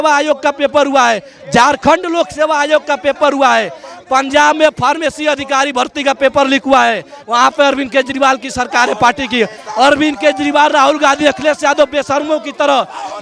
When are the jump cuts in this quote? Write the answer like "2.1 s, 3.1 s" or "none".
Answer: none